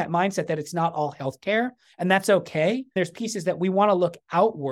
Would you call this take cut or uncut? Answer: cut